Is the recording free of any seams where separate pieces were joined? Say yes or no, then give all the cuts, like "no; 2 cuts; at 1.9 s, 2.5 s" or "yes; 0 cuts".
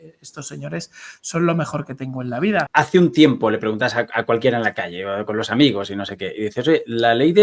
no; 1 cut; at 2.7 s